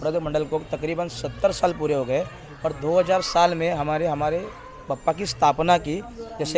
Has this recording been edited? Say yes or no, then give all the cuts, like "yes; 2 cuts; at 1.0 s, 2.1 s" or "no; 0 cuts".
no; 0 cuts